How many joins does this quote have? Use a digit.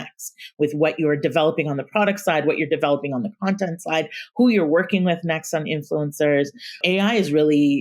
1